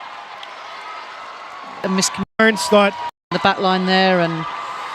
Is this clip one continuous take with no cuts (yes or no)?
no